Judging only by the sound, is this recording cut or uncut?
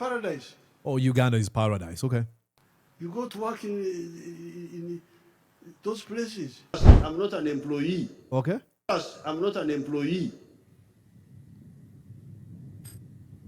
cut